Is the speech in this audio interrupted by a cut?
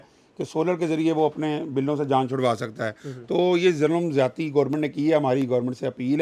no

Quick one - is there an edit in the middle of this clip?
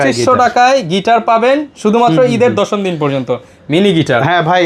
no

